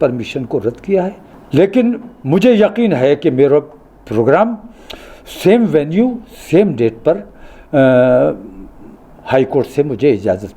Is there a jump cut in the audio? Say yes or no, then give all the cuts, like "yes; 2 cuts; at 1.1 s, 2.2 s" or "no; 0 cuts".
yes; 1 cut; at 1.3 s